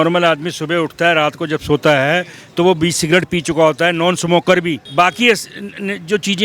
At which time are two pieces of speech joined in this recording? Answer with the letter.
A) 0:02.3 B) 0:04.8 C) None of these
B